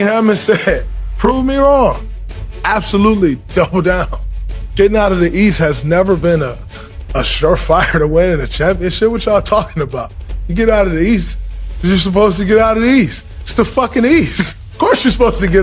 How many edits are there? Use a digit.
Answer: 0